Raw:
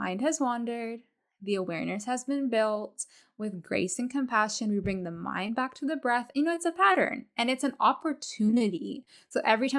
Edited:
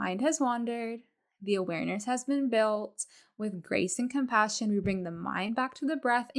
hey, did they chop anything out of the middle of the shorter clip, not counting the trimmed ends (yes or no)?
no